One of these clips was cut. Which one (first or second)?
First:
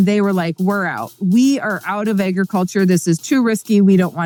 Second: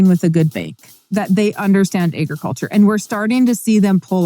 second